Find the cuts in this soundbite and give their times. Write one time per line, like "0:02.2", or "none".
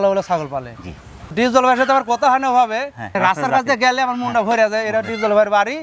0:01.3

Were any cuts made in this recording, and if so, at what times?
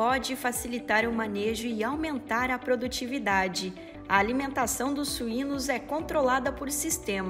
0:03.9

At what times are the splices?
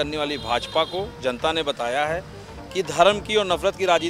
none

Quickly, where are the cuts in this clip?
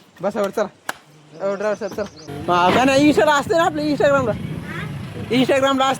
0:02.3

